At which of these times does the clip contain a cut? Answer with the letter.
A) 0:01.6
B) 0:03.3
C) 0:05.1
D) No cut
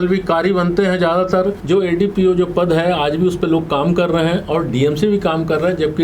A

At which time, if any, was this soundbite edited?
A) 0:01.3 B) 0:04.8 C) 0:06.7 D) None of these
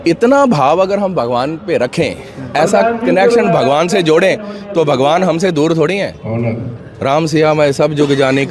D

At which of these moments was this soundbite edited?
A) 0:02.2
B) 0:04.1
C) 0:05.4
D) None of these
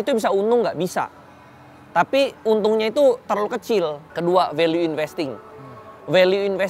B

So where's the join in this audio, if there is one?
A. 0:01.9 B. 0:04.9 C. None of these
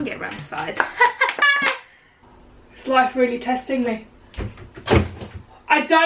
A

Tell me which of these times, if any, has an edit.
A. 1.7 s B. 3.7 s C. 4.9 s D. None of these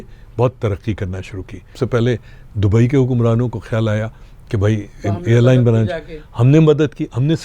A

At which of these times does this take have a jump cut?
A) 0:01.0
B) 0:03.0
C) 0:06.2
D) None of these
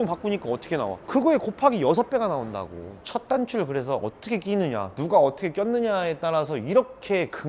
B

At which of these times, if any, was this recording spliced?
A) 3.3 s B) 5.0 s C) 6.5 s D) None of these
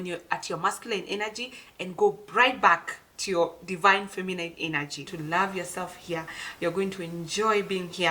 B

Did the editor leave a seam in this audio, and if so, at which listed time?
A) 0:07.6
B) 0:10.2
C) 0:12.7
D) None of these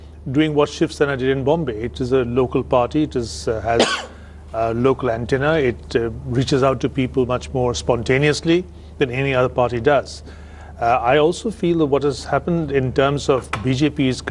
D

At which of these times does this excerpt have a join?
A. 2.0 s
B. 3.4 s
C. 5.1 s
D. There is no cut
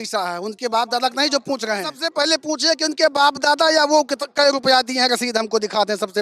A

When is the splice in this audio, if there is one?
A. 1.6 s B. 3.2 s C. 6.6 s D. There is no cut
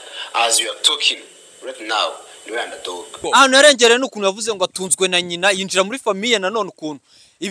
B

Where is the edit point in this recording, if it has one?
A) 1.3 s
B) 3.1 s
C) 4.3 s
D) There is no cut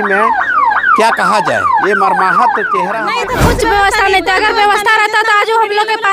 B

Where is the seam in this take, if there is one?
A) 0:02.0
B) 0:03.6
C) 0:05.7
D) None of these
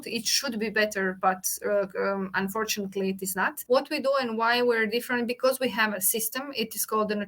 B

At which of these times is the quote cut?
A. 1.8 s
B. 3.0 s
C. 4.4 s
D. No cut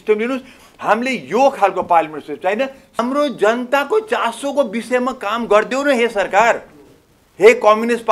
B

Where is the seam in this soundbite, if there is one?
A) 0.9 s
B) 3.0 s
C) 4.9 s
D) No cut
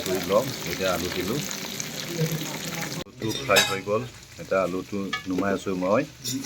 B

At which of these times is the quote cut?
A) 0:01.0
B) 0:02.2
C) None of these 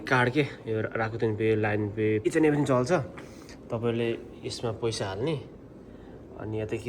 B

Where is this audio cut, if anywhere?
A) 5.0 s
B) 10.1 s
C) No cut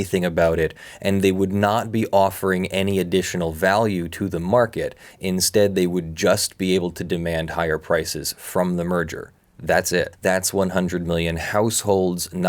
B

